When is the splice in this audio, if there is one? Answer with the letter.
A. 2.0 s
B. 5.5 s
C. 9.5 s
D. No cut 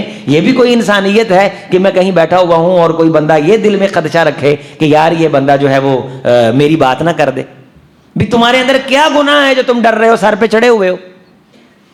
D